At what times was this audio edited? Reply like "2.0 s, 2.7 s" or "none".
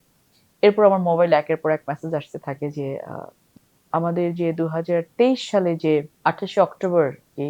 3.5 s, 6.1 s